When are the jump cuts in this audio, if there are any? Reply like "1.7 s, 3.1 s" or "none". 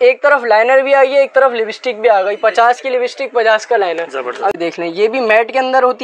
4.5 s